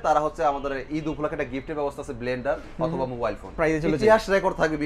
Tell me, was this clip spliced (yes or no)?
yes